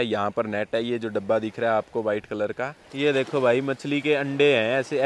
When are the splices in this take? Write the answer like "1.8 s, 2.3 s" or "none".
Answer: 2.8 s